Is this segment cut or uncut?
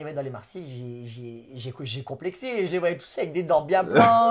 uncut